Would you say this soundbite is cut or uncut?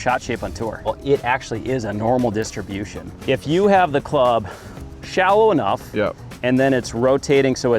cut